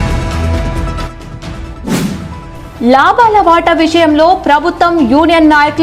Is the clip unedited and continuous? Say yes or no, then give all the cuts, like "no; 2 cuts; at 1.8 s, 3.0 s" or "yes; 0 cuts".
no; 2 cuts; at 1.2 s, 2.3 s